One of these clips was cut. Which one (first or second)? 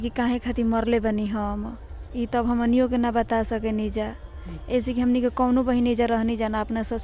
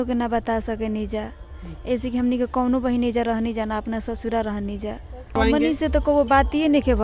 second